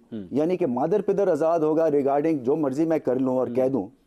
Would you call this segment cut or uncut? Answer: uncut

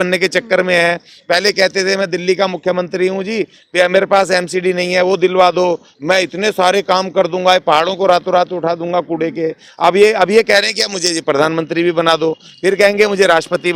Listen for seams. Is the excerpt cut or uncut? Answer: uncut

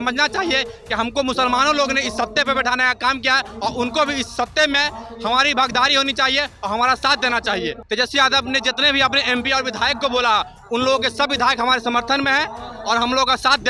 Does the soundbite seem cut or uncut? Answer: cut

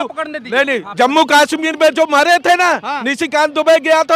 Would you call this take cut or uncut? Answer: uncut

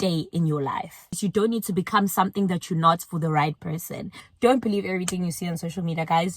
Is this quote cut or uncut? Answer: cut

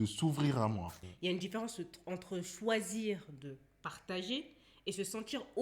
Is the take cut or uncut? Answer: cut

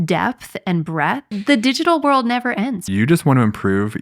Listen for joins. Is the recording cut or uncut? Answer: cut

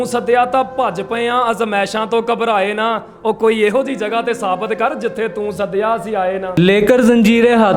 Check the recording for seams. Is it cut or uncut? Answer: cut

